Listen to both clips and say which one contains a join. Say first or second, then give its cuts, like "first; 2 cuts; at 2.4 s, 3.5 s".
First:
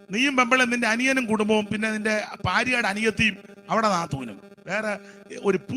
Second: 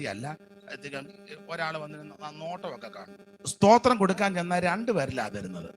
second; 1 cut; at 3.2 s